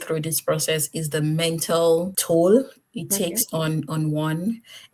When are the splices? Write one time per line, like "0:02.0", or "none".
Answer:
0:02.2